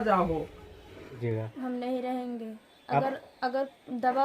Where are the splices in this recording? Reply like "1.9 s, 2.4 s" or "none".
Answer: 1.2 s